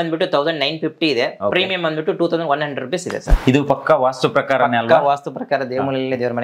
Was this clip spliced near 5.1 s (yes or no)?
no